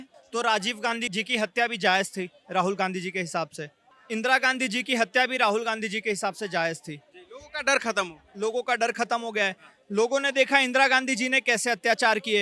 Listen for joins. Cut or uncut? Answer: uncut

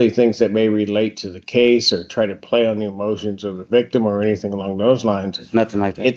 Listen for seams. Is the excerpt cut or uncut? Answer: uncut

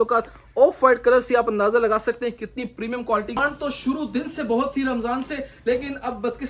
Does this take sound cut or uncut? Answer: cut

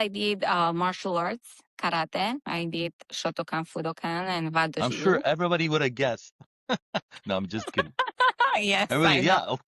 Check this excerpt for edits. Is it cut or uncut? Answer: uncut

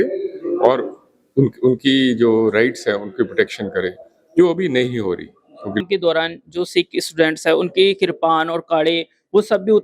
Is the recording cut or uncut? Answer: cut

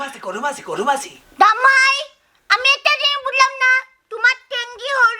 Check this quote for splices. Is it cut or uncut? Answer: cut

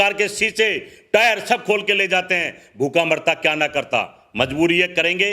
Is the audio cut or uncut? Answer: uncut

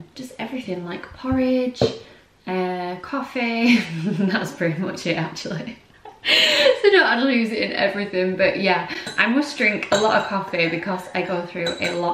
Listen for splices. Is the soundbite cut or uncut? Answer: uncut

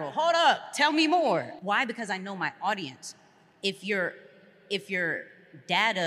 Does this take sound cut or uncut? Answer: cut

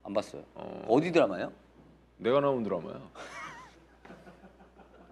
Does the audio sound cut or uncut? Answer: uncut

